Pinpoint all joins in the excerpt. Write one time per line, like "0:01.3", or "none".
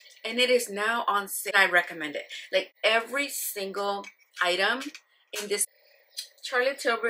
0:01.4
0:05.7